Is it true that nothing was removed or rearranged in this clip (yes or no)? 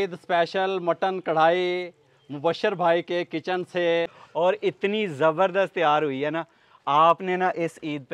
no